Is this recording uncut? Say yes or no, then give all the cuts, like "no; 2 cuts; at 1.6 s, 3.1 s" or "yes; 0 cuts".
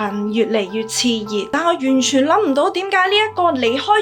no; 1 cut; at 1.5 s